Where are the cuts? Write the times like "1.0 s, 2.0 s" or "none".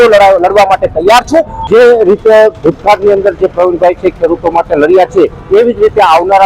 1.6 s